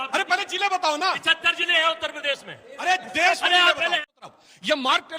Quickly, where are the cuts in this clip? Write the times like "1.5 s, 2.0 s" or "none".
4.2 s